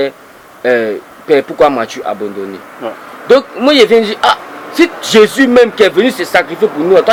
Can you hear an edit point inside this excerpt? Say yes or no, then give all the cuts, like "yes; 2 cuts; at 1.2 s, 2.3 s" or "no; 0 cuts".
no; 0 cuts